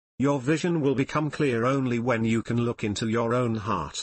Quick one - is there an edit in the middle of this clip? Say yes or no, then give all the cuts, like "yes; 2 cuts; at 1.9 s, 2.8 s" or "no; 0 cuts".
yes; 1 cut; at 0.9 s